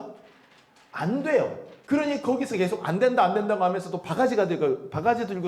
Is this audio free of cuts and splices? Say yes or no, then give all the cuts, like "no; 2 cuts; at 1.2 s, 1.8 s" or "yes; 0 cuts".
no; 1 cut; at 1.7 s